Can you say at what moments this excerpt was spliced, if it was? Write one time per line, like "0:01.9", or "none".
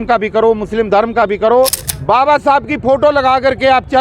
0:01.9